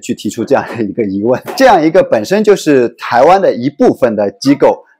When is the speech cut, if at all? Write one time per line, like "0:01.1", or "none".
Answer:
0:01.5